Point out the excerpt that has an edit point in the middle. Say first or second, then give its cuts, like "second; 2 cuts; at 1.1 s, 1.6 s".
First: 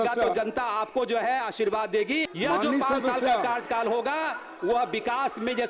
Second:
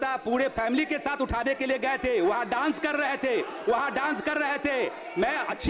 first; 1 cut; at 2.3 s